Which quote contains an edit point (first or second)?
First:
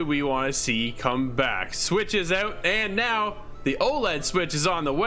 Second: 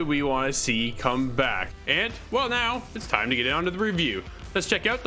second